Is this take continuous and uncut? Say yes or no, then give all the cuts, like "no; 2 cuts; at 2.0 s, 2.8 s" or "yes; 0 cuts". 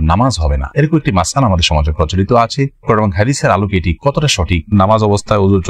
no; 1 cut; at 4.7 s